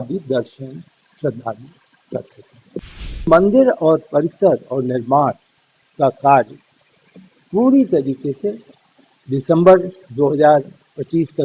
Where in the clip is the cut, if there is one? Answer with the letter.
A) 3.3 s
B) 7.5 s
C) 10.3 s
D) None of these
A